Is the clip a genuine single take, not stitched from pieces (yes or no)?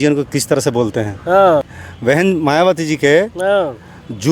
no